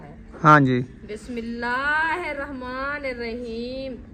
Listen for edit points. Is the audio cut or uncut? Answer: uncut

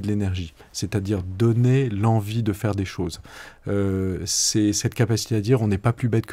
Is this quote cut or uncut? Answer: uncut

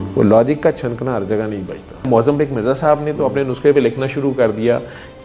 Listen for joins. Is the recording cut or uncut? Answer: cut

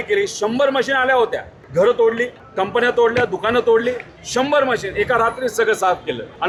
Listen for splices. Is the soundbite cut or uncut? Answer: uncut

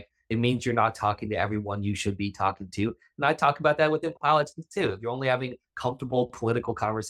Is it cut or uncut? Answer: uncut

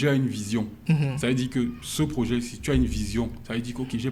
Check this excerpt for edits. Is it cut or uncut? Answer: uncut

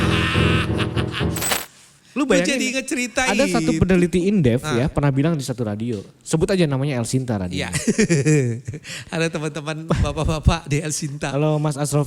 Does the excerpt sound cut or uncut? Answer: cut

